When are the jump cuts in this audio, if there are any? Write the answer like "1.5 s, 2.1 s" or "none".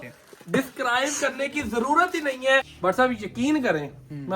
2.7 s